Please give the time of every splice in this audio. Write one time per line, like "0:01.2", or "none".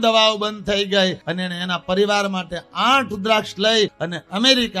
0:01.2
0:04.0